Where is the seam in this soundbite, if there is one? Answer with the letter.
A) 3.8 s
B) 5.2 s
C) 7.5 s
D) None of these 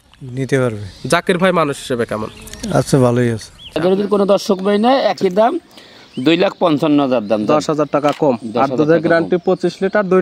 A